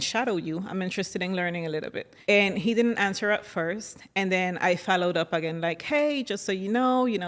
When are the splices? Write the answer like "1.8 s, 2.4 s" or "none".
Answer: 2.0 s